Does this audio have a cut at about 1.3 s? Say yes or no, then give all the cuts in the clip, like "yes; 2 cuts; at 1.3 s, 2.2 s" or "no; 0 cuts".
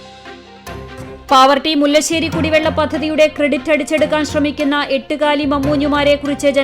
yes; 1 cut; at 1.3 s